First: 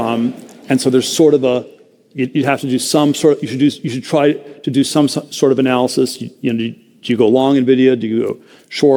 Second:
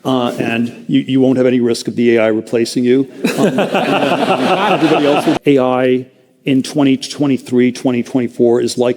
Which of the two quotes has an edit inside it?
second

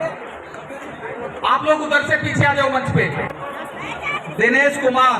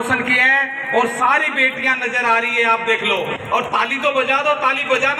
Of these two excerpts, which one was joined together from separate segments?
first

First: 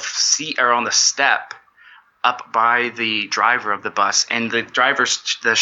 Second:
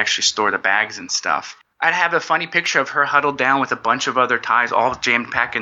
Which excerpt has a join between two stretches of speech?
second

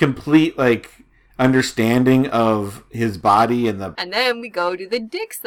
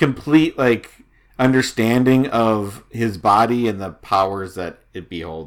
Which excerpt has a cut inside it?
first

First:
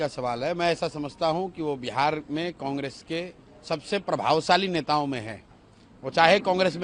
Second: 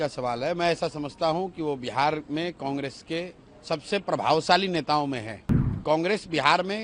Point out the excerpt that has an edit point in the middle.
second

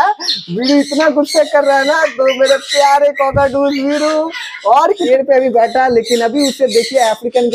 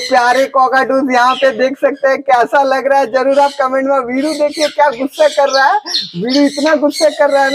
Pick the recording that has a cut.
first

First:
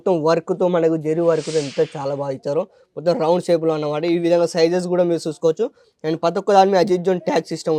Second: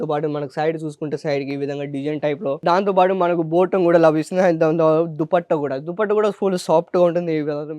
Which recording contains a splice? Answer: second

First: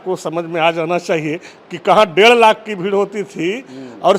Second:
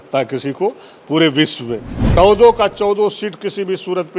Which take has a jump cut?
second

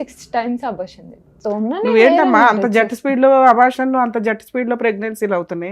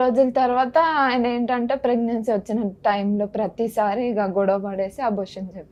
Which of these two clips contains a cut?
first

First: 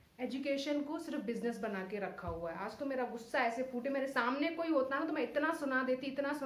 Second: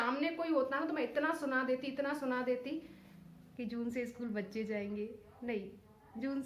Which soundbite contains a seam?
second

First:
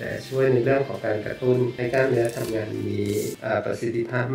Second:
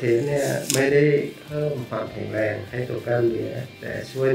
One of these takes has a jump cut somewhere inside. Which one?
first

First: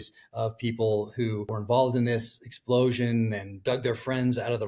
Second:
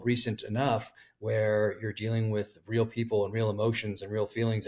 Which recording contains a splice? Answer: first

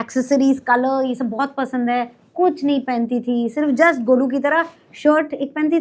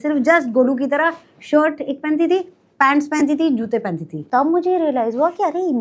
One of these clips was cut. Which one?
second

